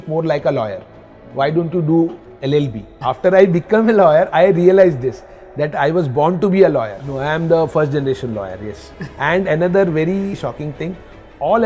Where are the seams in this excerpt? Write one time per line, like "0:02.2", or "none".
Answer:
0:02.8
0:07.0
0:10.4